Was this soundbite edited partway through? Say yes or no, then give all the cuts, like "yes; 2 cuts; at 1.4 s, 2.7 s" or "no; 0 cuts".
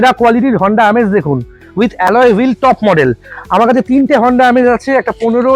no; 0 cuts